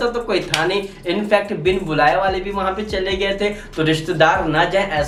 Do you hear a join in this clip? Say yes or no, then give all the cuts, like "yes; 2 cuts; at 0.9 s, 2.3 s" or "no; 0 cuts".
no; 0 cuts